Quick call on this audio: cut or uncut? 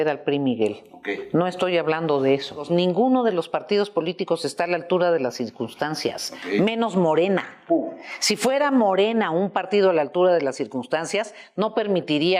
cut